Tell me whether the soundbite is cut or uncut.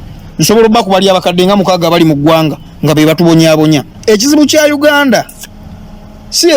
cut